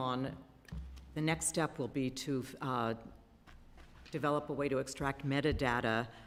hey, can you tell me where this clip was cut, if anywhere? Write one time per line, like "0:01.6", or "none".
none